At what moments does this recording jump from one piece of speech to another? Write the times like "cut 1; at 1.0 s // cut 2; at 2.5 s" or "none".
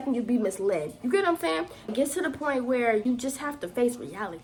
none